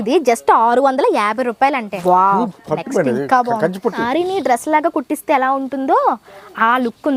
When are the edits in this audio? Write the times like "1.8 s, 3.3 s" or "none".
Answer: 1.9 s, 4.0 s